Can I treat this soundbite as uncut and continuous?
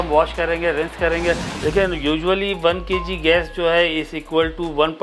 no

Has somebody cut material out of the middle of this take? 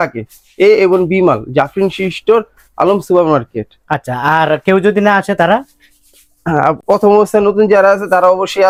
no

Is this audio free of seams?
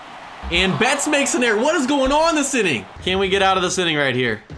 no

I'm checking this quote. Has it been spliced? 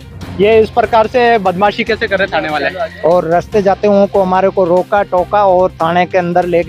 yes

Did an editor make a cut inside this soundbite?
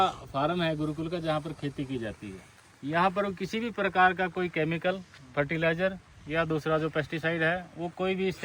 no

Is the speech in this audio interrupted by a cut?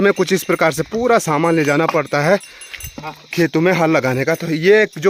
no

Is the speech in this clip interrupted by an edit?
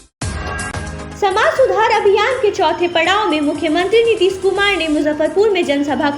no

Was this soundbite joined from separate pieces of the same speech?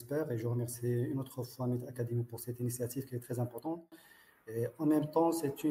no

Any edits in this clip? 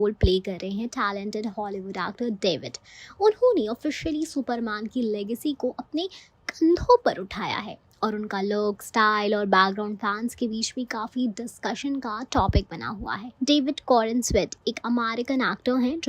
yes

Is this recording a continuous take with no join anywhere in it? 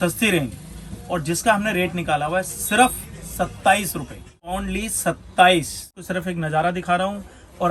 no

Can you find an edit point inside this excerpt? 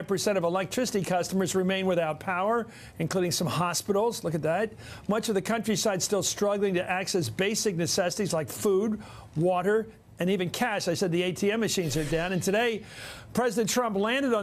no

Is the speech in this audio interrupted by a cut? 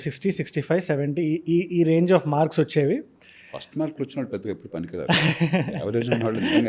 no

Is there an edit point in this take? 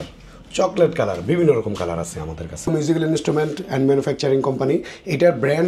yes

